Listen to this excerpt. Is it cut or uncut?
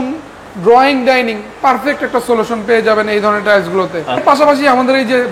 cut